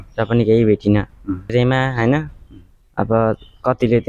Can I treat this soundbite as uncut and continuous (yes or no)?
no